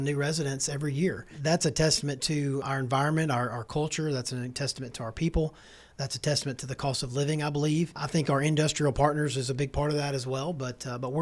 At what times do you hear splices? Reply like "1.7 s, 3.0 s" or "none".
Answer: 1.3 s

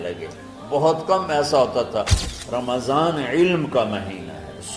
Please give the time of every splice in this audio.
2.2 s

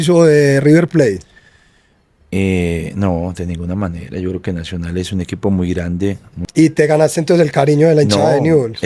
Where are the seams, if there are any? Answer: 6.3 s

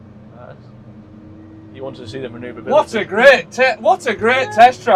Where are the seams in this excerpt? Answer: none

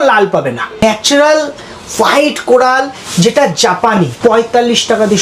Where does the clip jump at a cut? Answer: 0.8 s, 4.1 s

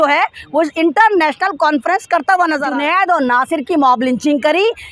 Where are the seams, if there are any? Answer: 2.7 s

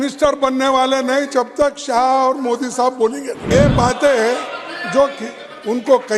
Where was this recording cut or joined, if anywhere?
3.4 s

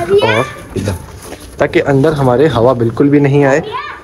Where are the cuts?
none

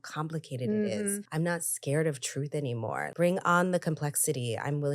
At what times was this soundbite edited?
1.2 s, 3.1 s

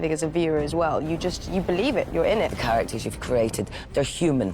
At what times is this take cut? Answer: 2.6 s

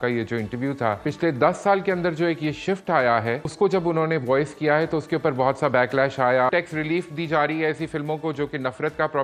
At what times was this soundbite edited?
1.0 s, 3.5 s, 6.5 s

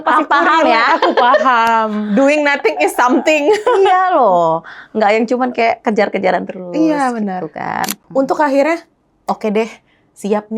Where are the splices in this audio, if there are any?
8.0 s

